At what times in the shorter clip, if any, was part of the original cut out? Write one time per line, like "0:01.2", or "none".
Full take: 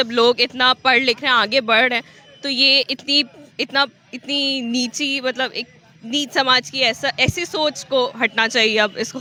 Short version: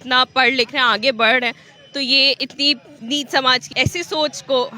0:02.9
0:03.7